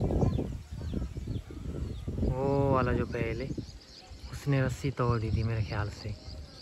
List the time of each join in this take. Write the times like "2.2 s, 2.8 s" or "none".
none